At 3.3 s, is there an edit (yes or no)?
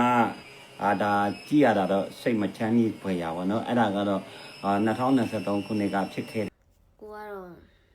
no